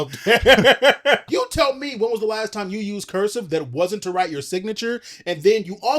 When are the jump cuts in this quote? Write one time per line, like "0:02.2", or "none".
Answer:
0:01.2